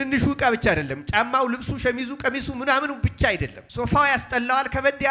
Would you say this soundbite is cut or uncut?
cut